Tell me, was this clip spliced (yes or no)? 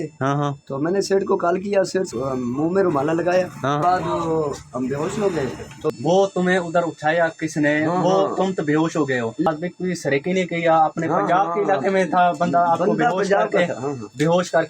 yes